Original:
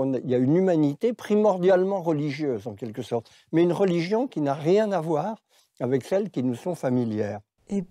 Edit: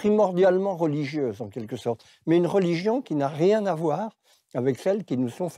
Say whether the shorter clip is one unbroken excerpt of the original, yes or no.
yes